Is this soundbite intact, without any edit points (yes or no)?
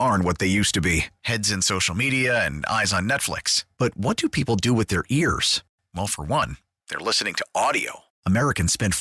yes